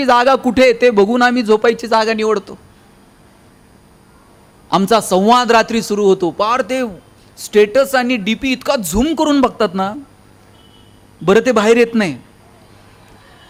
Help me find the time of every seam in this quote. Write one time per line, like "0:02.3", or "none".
none